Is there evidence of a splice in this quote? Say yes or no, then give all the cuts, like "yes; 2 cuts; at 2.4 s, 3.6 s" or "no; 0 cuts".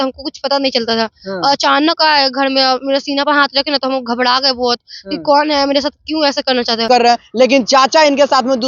yes; 1 cut; at 6.9 s